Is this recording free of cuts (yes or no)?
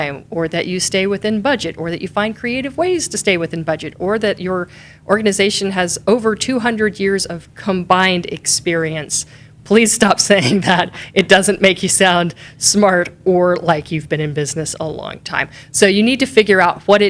yes